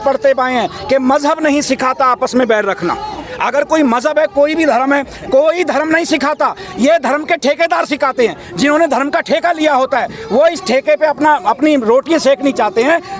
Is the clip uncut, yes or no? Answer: yes